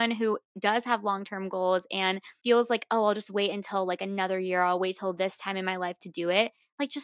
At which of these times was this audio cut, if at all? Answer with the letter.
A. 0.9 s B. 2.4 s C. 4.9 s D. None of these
D